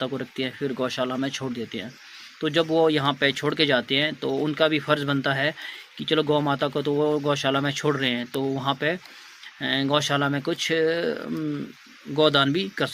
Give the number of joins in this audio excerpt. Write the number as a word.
zero